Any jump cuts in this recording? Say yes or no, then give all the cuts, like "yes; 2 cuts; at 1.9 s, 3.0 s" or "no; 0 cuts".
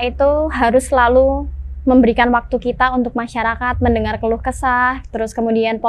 no; 0 cuts